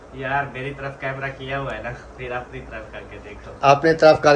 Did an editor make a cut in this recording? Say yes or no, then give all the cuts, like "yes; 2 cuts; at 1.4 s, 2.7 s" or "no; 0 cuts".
no; 0 cuts